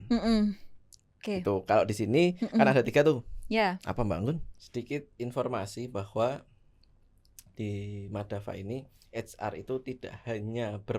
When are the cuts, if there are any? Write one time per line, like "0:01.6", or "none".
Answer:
0:04.6

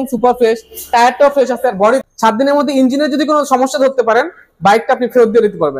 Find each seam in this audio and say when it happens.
0:02.0

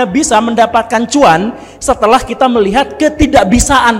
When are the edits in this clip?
none

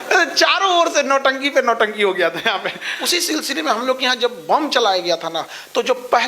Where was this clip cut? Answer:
0:02.9

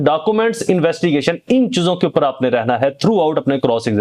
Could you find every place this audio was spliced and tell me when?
none

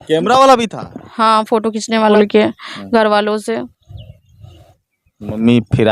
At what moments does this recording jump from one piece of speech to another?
0:02.1

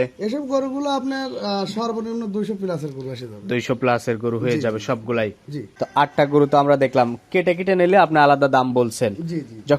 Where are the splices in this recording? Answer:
0:05.8

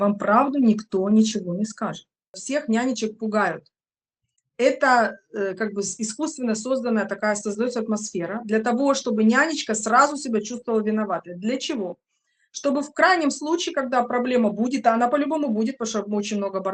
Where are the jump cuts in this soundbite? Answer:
0:02.4

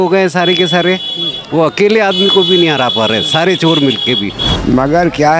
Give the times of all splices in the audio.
0:04.4

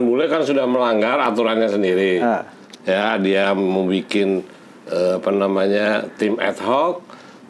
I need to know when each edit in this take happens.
none

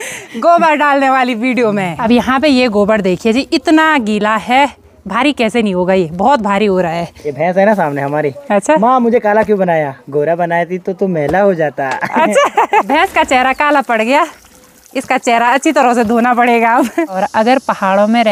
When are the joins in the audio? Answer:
0:01.9
0:07.1
0:12.9
0:17.1

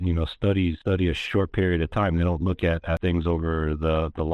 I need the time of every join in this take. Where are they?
0:00.8
0:03.0

